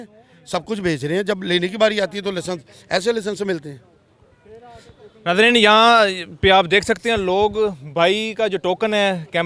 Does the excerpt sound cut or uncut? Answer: uncut